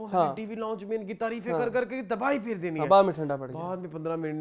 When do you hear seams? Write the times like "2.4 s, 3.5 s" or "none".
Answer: none